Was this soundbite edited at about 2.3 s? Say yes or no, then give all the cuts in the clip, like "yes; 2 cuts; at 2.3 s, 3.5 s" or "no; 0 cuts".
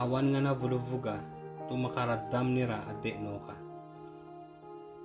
no; 0 cuts